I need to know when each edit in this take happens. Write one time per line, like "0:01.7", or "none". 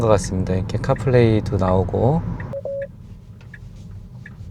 0:02.6

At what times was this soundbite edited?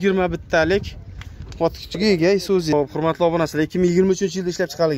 0:02.7

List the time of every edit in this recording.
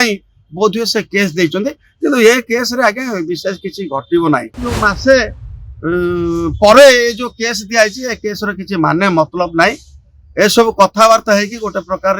0:04.7

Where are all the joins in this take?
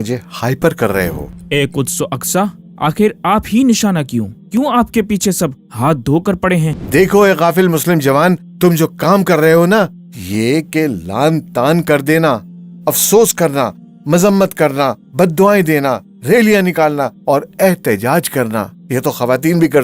0:01.3
0:06.8

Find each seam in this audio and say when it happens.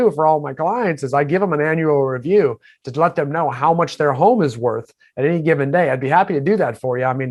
none

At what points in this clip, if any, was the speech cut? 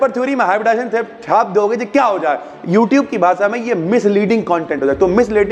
none

